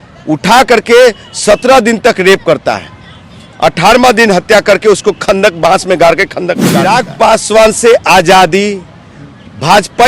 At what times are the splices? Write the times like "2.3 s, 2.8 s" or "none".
6.9 s